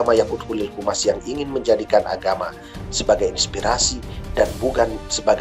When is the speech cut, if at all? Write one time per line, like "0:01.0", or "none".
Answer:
none